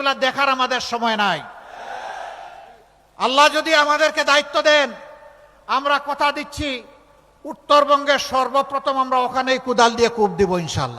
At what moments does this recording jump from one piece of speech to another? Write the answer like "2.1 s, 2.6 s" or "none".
1.1 s